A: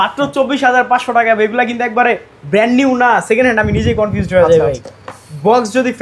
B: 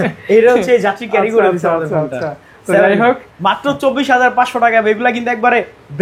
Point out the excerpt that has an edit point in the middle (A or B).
A